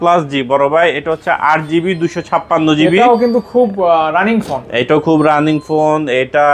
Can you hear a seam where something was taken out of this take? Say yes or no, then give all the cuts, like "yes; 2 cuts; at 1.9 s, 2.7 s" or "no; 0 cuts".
no; 0 cuts